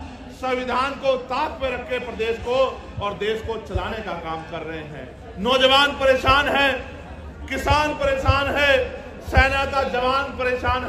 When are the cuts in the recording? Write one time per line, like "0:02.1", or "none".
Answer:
none